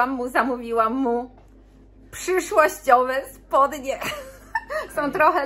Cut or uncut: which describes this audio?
uncut